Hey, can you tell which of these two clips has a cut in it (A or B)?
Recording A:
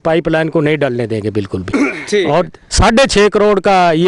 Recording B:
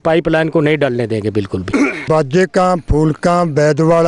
B